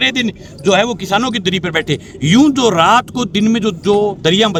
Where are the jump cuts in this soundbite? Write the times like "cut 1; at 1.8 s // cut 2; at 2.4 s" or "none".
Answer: none